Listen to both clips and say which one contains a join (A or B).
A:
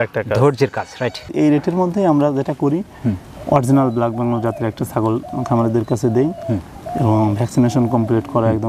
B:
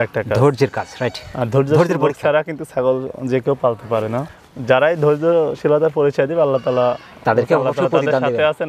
A